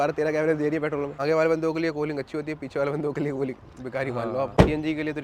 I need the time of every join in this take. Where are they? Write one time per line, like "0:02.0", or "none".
0:01.2
0:04.5